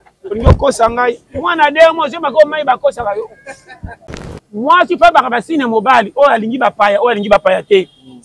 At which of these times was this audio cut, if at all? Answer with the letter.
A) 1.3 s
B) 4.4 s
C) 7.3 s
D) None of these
B